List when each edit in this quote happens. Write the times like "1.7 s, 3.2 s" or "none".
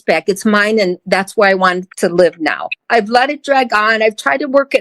2.8 s

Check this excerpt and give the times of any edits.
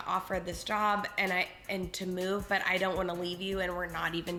none

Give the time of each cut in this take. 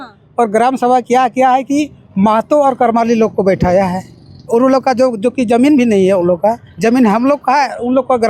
none

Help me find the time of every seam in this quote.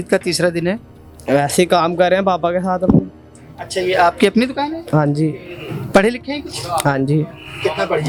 none

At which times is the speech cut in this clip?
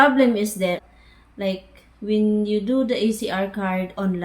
0.9 s

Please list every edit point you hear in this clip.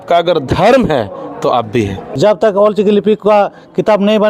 2.0 s

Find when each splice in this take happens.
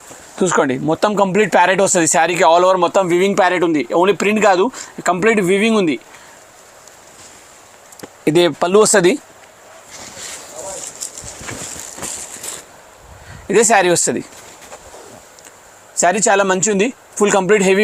none

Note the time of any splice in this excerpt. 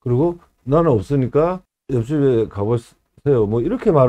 1.7 s

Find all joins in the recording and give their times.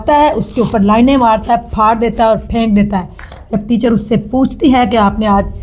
none

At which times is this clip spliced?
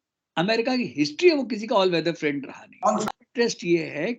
3.1 s

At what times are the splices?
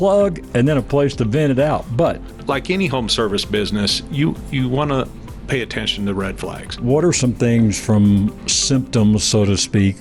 2.3 s, 6.8 s

